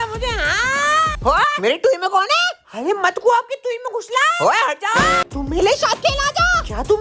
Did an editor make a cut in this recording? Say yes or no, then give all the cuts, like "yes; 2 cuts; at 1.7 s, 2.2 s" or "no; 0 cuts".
yes; 1 cut; at 5.3 s